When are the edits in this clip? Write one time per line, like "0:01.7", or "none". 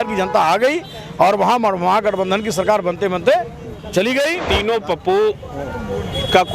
0:04.5